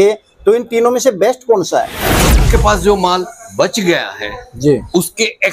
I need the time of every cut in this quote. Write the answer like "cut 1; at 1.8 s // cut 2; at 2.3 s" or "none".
cut 1; at 2.4 s